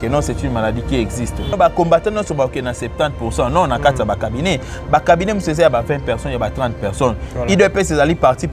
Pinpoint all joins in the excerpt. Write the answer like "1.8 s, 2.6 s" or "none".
1.5 s